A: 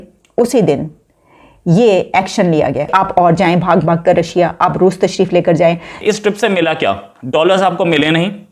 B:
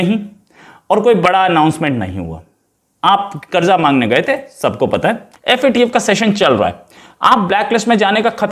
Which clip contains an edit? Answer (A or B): A